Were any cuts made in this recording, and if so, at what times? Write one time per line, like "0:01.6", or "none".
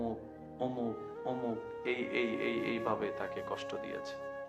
0:03.6